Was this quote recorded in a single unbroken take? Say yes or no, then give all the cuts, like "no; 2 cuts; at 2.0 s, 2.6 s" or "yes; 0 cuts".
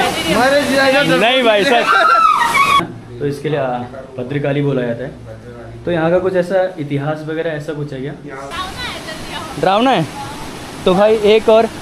no; 2 cuts; at 2.8 s, 8.5 s